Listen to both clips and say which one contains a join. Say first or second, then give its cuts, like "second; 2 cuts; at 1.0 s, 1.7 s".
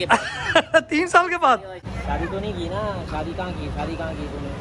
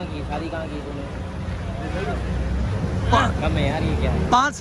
first; 1 cut; at 2.0 s